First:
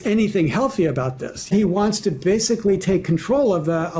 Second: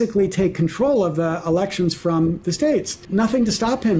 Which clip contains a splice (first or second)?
first